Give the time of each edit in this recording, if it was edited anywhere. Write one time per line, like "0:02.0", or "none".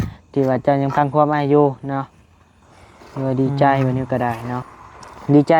0:04.6